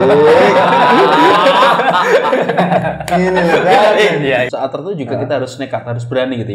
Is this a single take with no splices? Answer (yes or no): no